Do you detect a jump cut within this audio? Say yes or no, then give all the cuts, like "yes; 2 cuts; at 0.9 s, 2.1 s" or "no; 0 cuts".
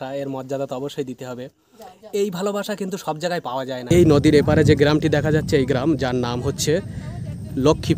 yes; 1 cut; at 3.9 s